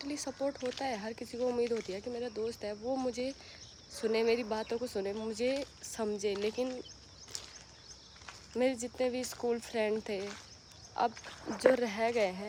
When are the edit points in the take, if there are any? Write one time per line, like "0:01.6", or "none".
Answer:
none